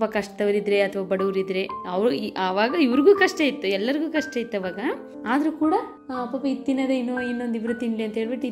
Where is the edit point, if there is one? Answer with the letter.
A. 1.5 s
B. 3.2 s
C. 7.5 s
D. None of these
D